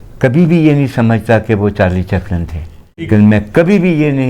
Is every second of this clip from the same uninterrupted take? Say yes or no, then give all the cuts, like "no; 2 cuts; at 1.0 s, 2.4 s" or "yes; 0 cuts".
no; 1 cut; at 3.1 s